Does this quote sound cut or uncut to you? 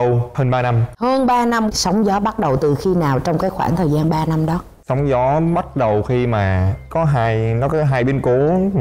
uncut